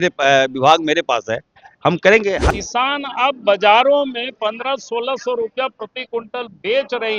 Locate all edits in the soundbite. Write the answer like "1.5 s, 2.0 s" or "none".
2.4 s